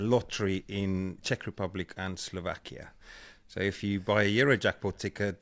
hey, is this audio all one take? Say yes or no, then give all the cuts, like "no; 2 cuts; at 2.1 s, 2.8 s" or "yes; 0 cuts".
yes; 0 cuts